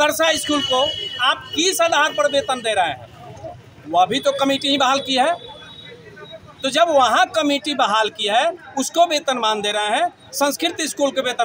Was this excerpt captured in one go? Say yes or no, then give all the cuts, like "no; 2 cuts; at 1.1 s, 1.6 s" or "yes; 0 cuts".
yes; 0 cuts